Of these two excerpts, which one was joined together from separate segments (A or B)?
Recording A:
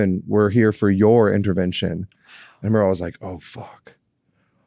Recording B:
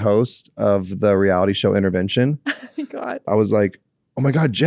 B